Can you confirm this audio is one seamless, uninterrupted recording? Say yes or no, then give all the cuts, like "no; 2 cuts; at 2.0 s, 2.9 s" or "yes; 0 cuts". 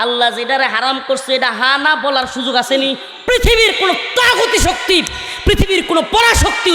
no; 1 cut; at 3.1 s